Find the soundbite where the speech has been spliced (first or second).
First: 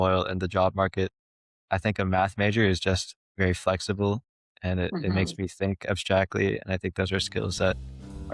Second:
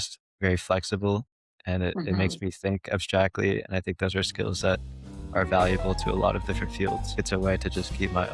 second